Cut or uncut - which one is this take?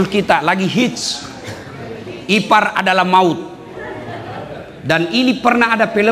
uncut